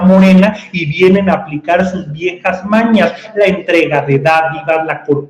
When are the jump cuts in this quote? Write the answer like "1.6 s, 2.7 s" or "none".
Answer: none